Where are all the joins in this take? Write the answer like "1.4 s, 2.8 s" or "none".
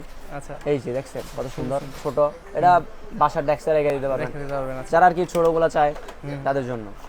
none